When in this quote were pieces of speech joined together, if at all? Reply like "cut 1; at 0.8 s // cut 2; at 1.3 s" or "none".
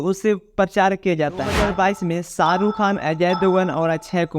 cut 1; at 1.5 s